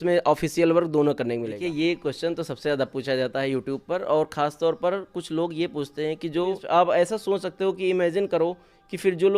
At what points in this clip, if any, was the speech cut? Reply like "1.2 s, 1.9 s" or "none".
1.6 s, 6.6 s

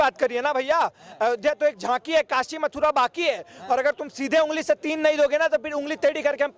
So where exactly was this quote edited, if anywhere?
none

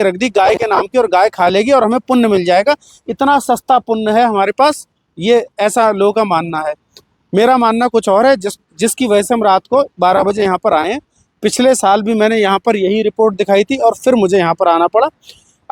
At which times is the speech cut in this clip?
none

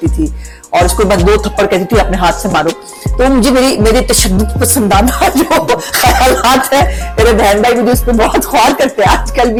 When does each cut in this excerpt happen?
none

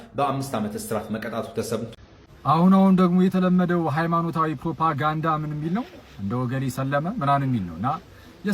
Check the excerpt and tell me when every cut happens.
1.9 s

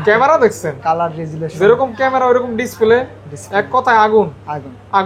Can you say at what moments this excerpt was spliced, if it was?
none

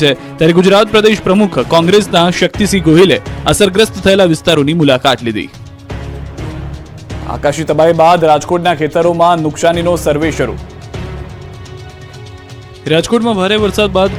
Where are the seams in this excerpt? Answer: none

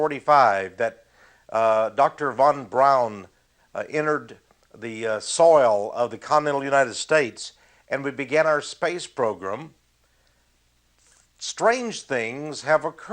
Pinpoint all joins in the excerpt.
8.1 s

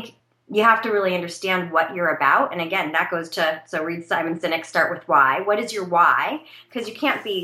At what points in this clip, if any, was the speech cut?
none

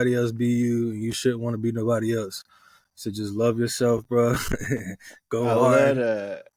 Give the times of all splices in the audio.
none

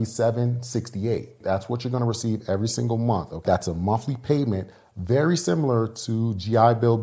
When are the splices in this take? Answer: 1.4 s, 3.4 s

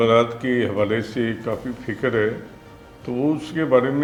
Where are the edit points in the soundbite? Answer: none

